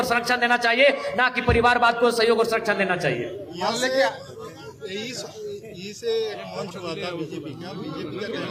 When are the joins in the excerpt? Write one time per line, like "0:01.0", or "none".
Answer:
none